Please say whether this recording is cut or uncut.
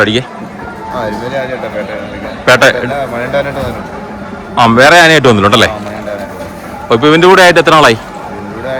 uncut